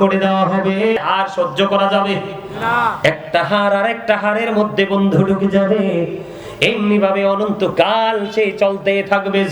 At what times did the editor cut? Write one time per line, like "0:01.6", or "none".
0:01.0

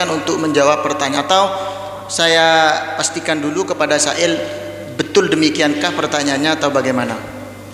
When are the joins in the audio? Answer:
none

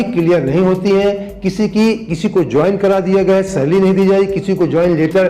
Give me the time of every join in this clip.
none

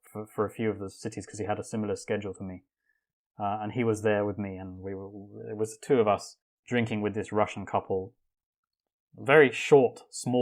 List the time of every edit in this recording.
none

